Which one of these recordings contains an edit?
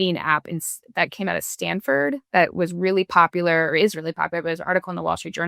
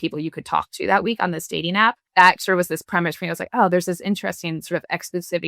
second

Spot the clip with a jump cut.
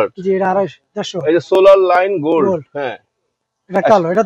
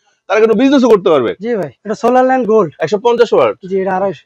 second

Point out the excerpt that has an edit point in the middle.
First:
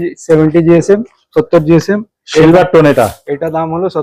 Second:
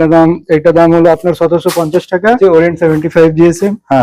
second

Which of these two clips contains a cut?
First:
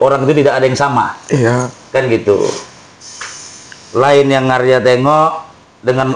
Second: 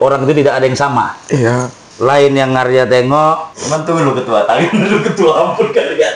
second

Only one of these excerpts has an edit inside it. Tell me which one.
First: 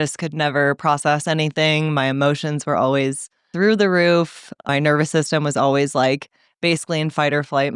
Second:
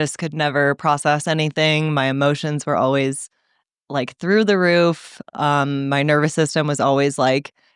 first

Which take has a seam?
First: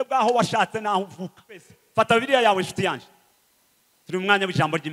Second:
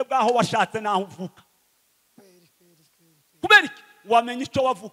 first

